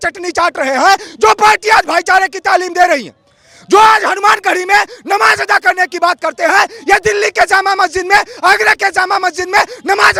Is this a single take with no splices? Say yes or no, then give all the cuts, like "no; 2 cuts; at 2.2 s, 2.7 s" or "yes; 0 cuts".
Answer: yes; 0 cuts